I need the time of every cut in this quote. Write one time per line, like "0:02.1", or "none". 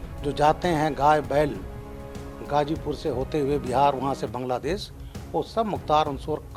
none